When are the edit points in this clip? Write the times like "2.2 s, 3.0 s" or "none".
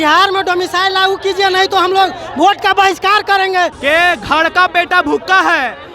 3.8 s